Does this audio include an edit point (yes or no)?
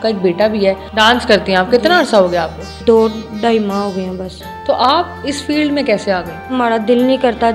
yes